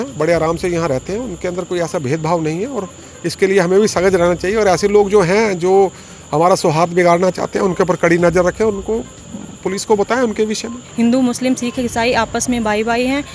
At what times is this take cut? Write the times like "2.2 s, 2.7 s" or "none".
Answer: 10.9 s